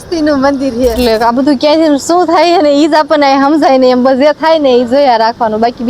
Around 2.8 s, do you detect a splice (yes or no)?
no